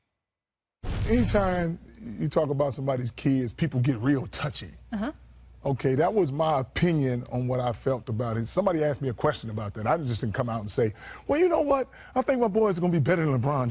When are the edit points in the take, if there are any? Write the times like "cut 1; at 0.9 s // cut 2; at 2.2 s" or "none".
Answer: cut 1; at 1.8 s